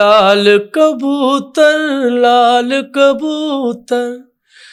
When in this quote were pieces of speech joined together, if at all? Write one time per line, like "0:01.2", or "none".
none